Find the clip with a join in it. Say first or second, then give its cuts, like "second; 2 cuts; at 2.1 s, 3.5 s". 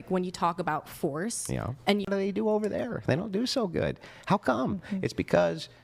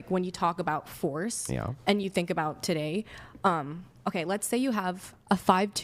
first; 1 cut; at 2.1 s